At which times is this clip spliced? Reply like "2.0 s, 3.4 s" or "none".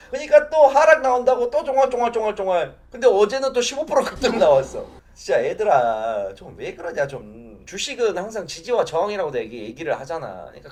none